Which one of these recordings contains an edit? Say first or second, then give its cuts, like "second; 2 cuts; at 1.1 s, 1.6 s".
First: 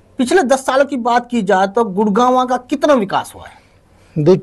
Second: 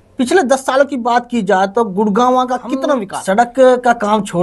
second; 1 cut; at 3.1 s